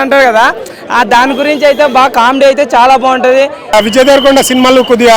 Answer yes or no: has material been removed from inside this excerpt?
yes